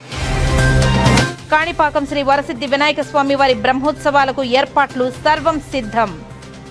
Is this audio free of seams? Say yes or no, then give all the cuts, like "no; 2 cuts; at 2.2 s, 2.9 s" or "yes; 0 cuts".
yes; 0 cuts